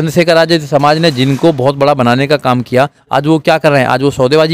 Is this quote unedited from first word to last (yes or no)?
yes